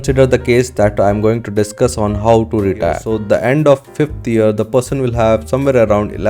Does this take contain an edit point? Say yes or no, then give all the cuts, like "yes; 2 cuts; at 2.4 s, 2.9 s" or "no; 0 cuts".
yes; 1 cut; at 3.1 s